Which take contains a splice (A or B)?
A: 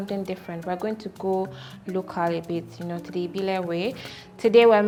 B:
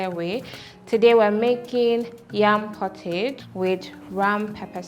B